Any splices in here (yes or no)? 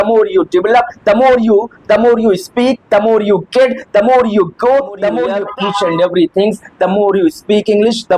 yes